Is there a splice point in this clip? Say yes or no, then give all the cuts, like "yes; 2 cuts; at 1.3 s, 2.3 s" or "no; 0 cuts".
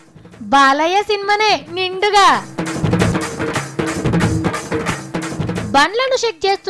yes; 1 cut; at 3.1 s